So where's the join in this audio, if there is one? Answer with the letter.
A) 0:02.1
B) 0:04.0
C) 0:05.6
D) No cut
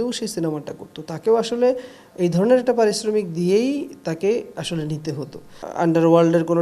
C